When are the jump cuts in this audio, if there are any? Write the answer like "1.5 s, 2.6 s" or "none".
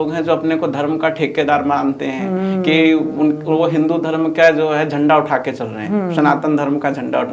none